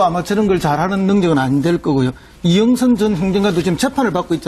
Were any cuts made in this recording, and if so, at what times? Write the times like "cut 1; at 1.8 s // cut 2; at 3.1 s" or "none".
none